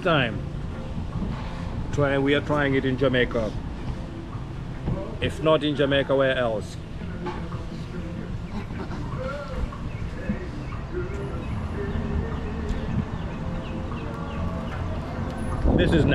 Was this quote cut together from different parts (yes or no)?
no